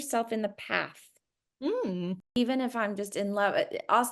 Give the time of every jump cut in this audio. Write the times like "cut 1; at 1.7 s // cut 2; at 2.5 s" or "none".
cut 1; at 2.2 s